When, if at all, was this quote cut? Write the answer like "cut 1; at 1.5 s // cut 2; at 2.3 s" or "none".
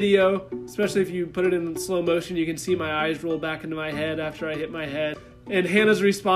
cut 1; at 5.2 s